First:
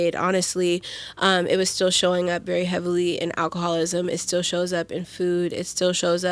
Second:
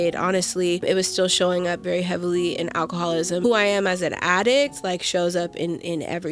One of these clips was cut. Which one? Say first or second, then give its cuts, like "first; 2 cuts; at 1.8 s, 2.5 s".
second; 2 cuts; at 0.8 s, 3.4 s